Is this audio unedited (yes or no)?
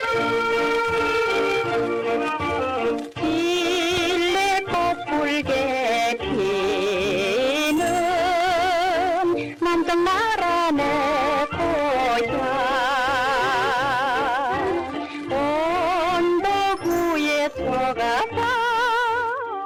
yes